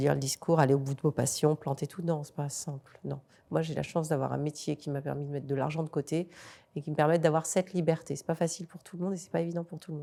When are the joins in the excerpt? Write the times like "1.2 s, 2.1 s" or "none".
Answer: none